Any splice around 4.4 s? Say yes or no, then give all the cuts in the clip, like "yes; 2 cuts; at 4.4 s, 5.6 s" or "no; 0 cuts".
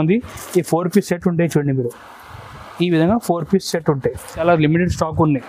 yes; 1 cut; at 4.4 s